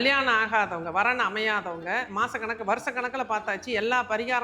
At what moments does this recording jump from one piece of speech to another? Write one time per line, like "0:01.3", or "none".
0:02.1